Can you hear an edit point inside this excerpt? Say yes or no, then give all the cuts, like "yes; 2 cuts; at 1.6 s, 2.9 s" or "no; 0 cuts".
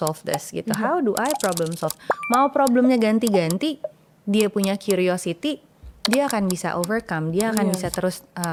no; 0 cuts